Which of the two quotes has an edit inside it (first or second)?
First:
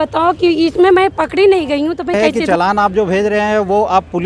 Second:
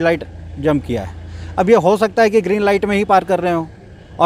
first